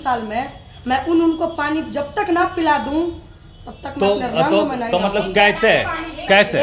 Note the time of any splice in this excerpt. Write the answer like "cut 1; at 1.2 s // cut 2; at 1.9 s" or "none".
none